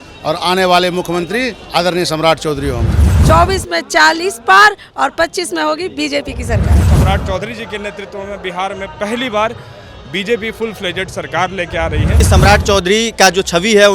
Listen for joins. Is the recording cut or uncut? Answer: cut